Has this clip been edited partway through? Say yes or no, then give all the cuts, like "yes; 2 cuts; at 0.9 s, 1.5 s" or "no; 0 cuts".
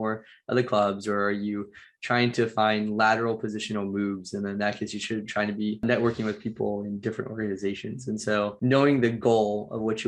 yes; 1 cut; at 5.8 s